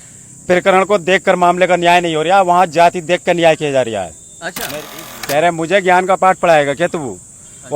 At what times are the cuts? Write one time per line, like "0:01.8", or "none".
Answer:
0:04.9